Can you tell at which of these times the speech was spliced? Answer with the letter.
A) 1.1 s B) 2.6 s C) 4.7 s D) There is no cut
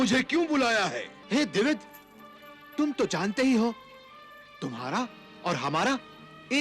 A